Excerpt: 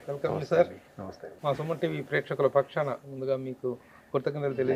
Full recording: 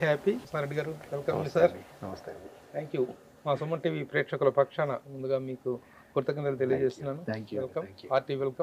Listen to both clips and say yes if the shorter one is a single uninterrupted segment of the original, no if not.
no